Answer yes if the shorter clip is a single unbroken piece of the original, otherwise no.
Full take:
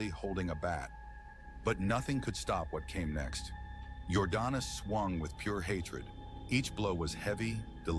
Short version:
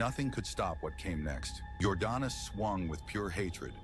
no